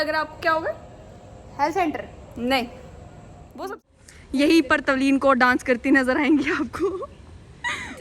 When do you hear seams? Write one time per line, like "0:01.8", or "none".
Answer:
0:03.6